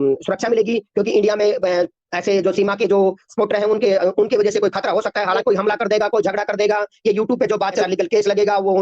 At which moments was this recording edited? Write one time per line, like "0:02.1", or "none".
0:05.4
0:07.8